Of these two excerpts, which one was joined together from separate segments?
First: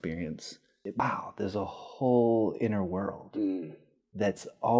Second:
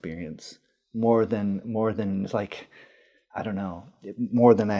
first; 1 cut; at 1.0 s

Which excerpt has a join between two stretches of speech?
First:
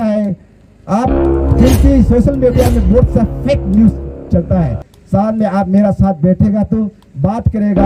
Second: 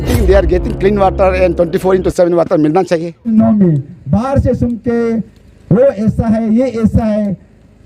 second; 1 cut; at 3.3 s

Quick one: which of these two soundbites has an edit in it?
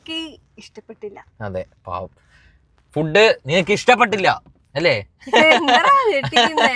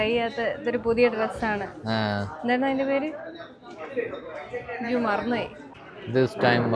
second; 1 cut; at 5.6 s

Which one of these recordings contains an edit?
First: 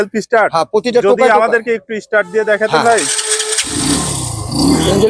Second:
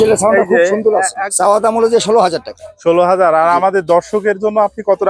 second; 1 cut; at 1.3 s

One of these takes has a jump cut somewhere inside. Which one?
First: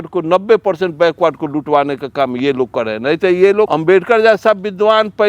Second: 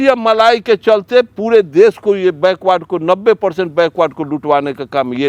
first; 1 cut; at 3.7 s

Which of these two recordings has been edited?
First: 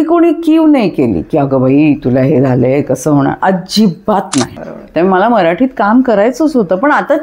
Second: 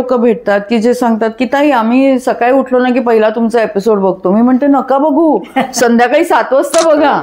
first; 1 cut; at 4.6 s

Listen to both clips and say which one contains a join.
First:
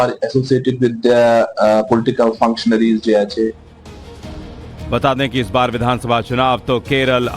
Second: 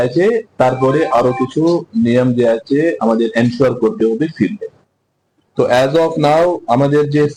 first; 1 cut; at 1.7 s

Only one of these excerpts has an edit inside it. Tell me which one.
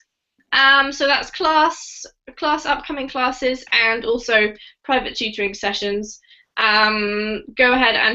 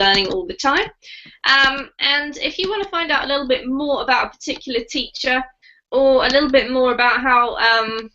second; 1 cut; at 5.1 s

